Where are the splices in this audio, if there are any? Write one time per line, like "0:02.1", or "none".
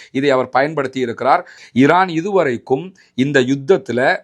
0:01.6